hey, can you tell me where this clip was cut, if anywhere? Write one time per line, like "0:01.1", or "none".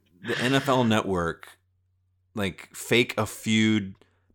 none